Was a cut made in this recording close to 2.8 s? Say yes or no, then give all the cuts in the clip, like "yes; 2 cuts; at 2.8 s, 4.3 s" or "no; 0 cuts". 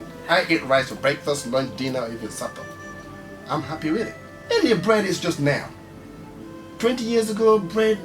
no; 1 cut; at 4.3 s